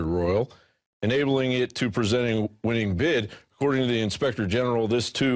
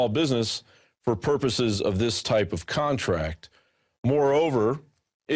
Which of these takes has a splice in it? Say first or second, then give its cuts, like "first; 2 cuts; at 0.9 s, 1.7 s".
second; 1 cut; at 2.4 s